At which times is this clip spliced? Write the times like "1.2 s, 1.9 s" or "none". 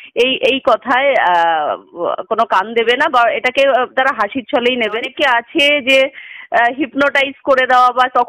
5.1 s